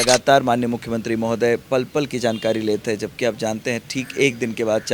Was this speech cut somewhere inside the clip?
no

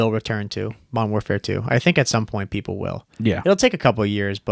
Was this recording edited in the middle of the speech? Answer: no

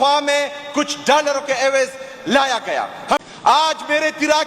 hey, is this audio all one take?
no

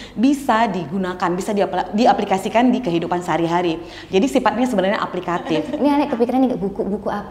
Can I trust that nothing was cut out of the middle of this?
no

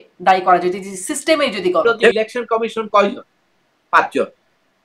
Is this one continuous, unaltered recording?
no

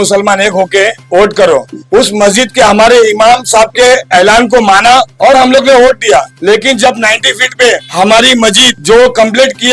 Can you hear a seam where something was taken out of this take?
yes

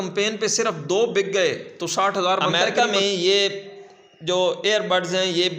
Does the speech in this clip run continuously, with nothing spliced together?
no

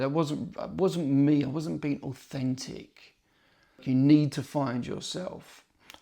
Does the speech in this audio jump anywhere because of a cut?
yes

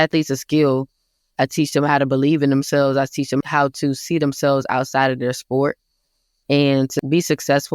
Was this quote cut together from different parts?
yes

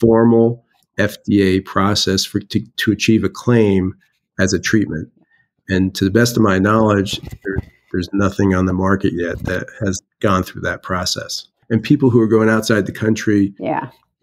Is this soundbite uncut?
no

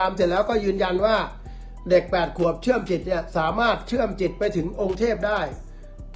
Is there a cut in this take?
no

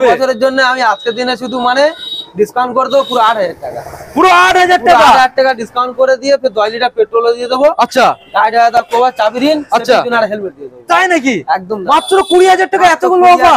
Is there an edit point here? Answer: no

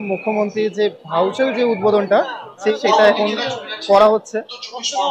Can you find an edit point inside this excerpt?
no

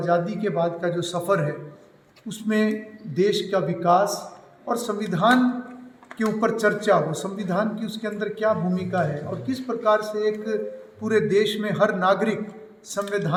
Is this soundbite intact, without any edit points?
yes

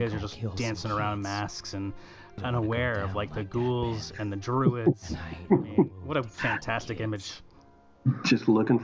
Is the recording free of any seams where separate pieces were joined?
no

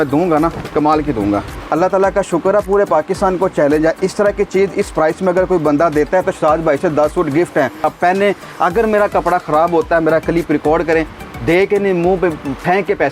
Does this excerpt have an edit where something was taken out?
yes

